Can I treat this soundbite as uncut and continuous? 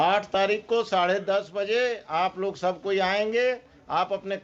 yes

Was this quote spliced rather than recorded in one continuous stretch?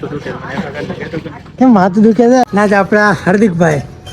yes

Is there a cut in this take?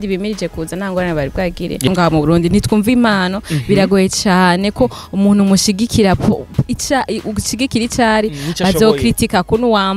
yes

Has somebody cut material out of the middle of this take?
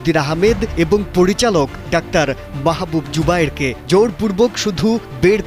yes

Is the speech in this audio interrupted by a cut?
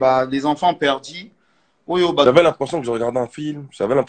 yes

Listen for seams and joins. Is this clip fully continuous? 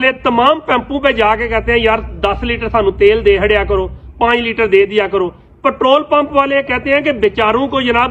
yes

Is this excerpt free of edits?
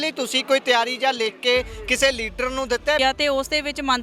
no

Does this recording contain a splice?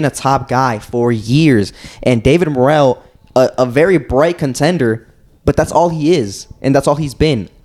no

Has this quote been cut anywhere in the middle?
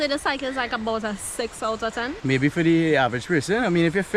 yes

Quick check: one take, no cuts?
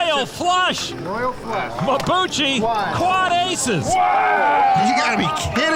yes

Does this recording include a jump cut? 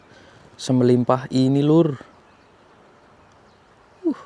no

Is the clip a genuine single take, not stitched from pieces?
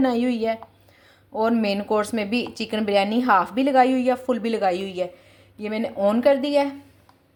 yes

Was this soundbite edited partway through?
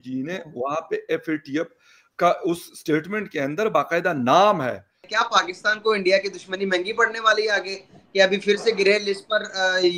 yes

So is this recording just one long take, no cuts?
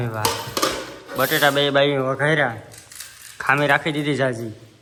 yes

